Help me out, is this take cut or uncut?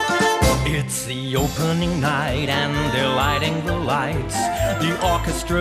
uncut